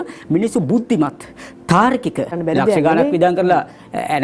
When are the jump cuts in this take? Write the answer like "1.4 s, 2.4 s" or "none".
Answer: 2.4 s